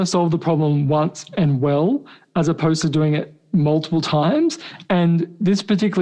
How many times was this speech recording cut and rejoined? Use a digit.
1